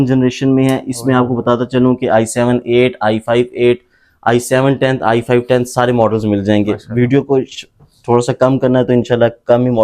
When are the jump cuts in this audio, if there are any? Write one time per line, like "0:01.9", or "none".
none